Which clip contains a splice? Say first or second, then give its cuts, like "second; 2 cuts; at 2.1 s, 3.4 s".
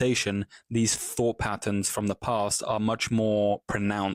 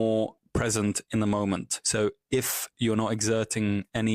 second; 1 cut; at 1.8 s